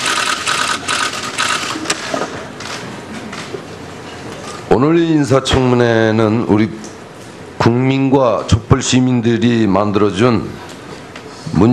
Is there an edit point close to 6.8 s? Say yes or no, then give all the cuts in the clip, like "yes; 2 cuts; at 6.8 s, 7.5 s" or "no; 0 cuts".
yes; 1 cut; at 6.8 s